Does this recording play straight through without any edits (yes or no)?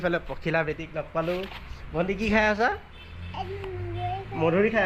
yes